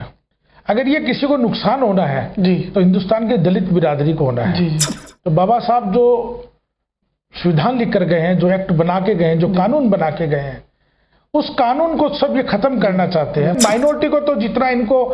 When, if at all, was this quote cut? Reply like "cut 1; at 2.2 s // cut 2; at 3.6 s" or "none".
cut 1; at 13.6 s